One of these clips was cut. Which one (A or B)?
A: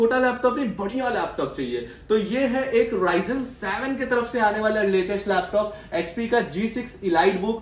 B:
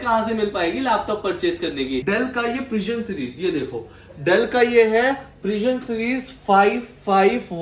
B